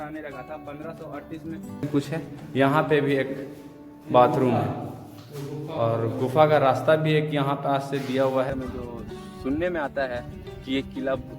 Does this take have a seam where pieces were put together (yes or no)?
yes